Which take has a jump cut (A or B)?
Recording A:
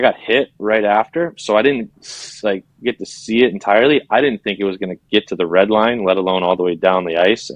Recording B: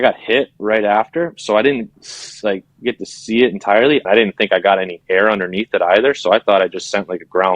B